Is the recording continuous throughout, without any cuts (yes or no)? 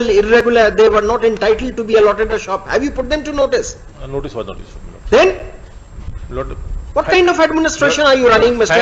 yes